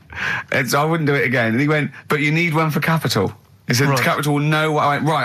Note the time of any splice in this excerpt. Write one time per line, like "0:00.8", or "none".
none